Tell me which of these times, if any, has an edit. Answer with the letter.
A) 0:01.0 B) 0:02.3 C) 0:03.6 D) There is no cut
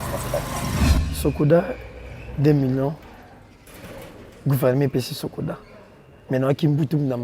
A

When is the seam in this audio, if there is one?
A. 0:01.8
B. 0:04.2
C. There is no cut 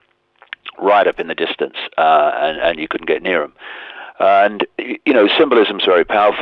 A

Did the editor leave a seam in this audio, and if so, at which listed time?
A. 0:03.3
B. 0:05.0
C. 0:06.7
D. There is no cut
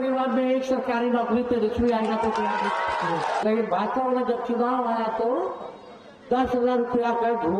A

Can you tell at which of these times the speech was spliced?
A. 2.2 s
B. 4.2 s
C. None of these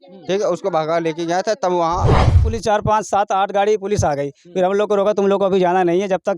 A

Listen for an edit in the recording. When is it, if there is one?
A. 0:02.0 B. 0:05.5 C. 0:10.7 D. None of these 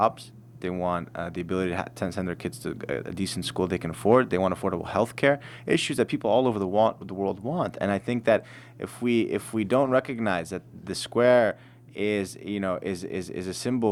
D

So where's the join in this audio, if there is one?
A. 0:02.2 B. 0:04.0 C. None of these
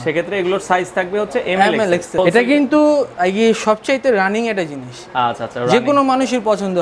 A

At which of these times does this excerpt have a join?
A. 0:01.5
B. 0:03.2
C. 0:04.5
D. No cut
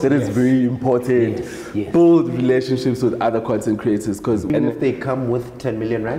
C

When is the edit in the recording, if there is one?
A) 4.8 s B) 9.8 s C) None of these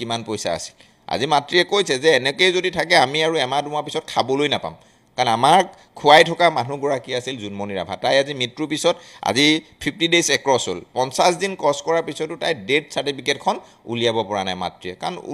C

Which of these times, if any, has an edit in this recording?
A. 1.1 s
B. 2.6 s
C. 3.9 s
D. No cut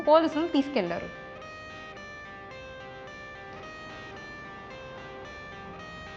A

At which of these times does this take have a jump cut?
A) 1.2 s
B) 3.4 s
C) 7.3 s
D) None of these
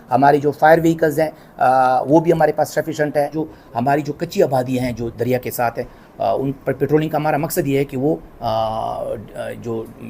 B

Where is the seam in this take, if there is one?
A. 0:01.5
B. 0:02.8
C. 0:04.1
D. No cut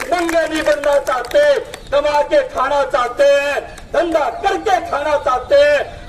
D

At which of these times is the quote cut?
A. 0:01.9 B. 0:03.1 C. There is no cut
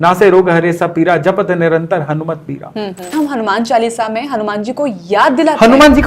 B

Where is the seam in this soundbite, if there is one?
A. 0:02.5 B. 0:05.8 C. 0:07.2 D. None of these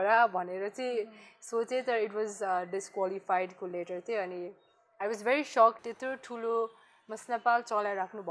B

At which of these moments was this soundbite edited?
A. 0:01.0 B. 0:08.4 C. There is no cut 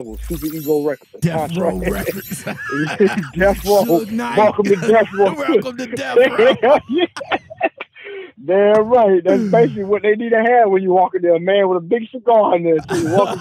A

